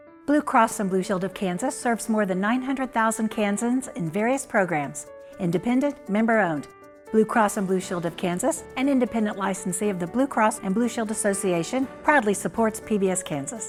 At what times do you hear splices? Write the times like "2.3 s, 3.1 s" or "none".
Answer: none